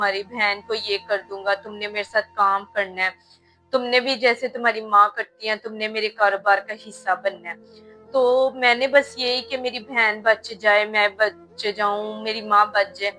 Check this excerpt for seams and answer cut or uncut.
uncut